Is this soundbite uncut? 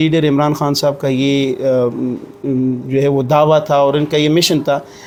yes; 0 cuts

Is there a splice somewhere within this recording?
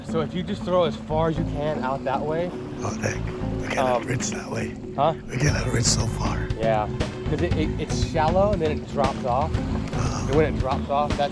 no; 0 cuts

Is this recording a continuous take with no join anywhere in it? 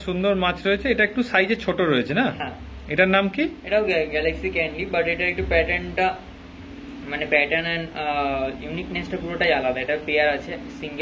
yes; 0 cuts

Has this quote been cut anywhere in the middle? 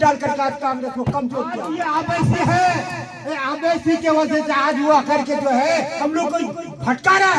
yes; 2 cuts; at 1.7 s, 6.0 s

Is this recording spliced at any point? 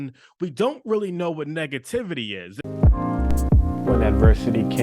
yes; 1 cut; at 2.5 s

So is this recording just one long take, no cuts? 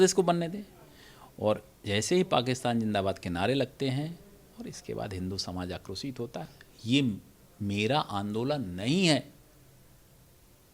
no; 1 cut; at 6.5 s

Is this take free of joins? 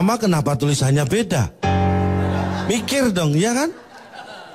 yes; 0 cuts

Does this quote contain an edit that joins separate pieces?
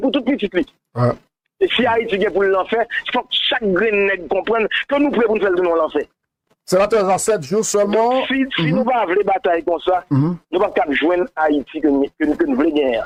no; 0 cuts

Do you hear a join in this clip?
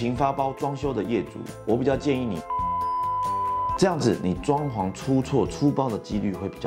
no; 0 cuts

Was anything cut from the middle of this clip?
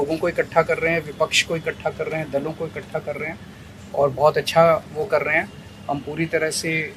no; 0 cuts

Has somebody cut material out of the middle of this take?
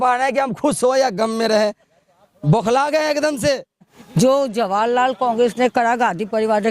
yes; 1 cut; at 4.0 s

